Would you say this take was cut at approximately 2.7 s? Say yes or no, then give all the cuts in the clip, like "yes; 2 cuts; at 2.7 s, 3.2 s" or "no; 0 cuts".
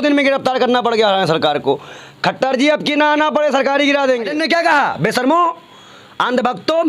no; 1 cut; at 4.3 s